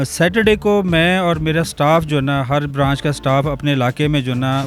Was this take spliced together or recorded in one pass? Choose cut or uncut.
uncut